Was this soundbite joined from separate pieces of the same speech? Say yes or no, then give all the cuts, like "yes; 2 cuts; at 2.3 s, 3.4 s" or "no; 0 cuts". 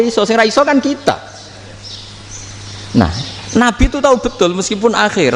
no; 0 cuts